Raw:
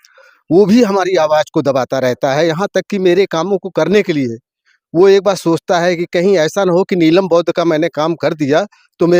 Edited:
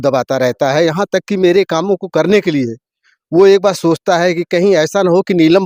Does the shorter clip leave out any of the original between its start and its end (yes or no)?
no